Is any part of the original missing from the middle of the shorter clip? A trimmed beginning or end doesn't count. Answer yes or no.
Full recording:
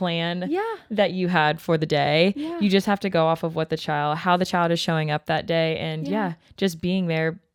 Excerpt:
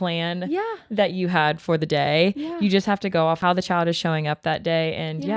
yes